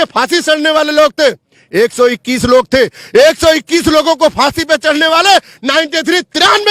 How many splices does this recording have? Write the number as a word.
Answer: zero